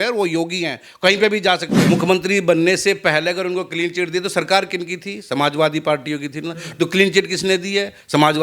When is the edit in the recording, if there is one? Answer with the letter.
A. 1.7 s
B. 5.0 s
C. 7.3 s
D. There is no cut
A